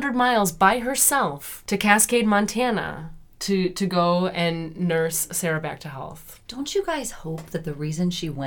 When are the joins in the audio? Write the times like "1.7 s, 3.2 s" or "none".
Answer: 6.3 s